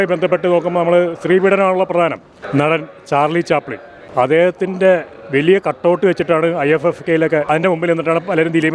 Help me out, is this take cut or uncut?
cut